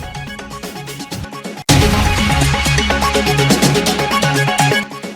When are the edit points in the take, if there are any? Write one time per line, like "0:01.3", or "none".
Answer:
0:00.7
0:01.6
0:03.0
0:04.4